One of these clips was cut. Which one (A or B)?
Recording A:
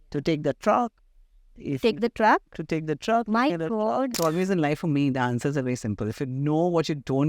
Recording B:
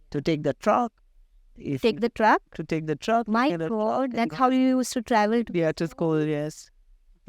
A